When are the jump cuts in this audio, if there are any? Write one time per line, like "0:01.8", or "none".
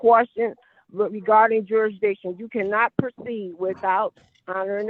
none